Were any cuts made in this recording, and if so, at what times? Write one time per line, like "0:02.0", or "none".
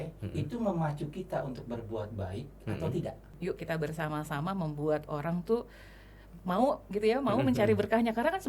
0:03.3